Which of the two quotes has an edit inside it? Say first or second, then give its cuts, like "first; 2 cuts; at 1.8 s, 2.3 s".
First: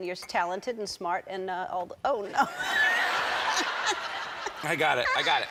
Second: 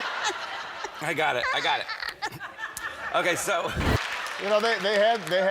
second; 1 cut; at 3.7 s